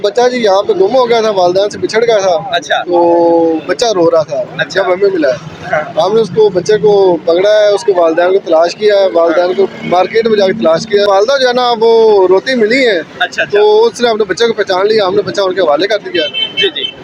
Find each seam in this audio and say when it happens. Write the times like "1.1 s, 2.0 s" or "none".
none

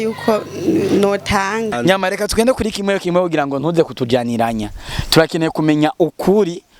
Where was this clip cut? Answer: 1.7 s

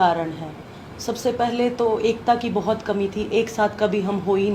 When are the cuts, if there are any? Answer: none

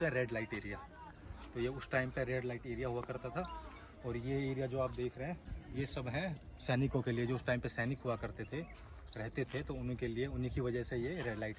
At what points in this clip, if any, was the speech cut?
none

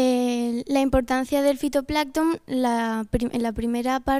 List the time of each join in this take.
2.6 s

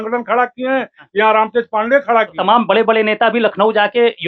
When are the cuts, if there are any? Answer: 2.3 s

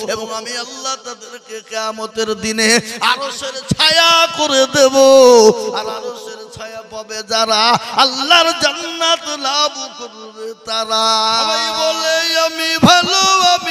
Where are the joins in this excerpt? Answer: 11.7 s

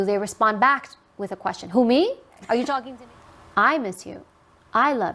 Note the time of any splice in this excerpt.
2.9 s

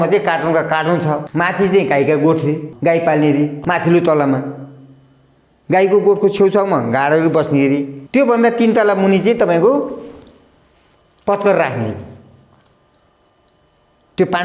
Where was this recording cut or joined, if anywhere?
1.3 s, 2.7 s, 3.6 s, 8.0 s

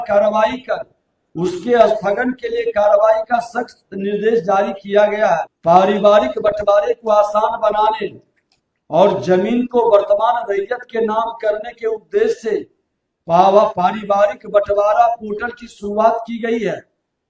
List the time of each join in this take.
5.5 s

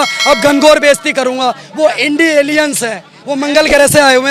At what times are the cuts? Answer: none

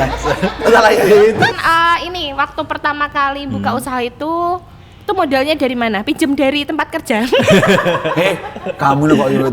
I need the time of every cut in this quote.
1.5 s

